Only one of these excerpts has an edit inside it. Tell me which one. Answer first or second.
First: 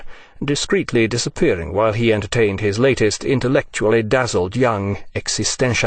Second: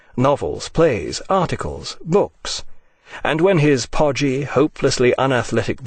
first